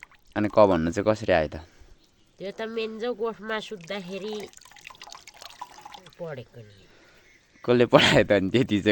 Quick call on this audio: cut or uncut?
uncut